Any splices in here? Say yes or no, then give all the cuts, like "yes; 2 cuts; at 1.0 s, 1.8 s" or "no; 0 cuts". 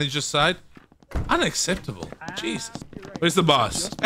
yes; 1 cut; at 2.8 s